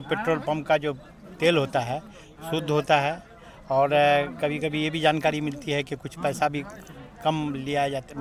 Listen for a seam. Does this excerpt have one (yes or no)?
no